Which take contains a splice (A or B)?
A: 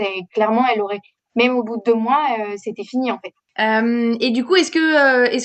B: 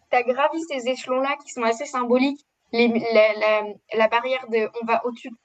A